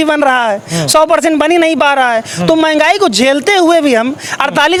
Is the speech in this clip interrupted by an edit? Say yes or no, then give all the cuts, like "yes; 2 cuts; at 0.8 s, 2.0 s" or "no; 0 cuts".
no; 0 cuts